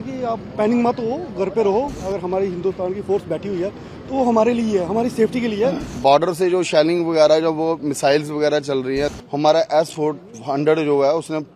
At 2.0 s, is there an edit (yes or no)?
yes